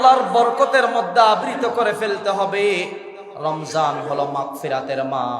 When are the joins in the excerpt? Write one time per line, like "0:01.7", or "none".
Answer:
none